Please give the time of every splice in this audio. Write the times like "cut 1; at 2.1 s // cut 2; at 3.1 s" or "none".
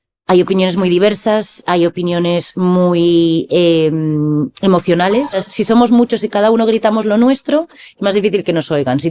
cut 1; at 5.4 s